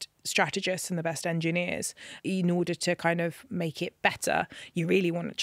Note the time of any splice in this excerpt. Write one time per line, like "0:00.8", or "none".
0:02.1